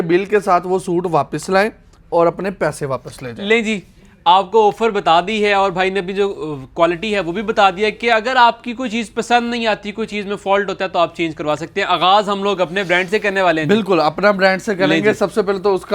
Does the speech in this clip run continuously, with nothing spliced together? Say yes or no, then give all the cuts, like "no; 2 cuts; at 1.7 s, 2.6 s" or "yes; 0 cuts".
yes; 0 cuts